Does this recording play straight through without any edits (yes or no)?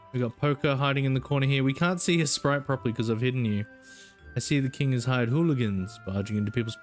yes